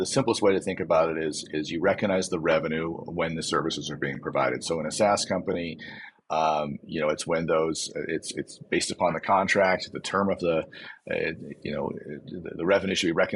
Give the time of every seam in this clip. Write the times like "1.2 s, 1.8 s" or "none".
none